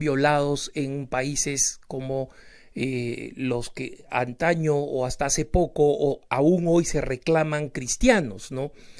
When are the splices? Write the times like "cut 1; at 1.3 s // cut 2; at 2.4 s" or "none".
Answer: cut 1; at 1.3 s